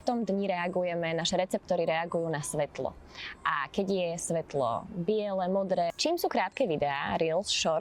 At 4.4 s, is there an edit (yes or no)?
no